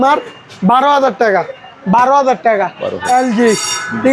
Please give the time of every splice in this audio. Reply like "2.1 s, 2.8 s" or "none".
1.6 s, 2.9 s